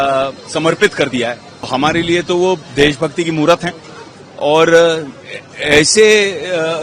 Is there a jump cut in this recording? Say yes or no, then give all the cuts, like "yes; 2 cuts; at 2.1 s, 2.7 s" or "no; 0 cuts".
yes; 1 cut; at 1.7 s